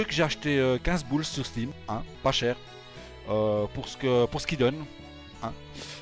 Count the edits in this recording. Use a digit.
1